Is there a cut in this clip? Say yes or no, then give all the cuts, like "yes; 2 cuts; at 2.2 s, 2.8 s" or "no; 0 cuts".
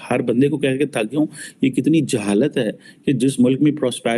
no; 0 cuts